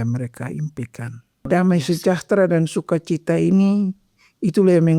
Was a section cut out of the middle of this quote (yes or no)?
yes